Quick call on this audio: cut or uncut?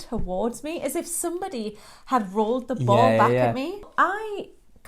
cut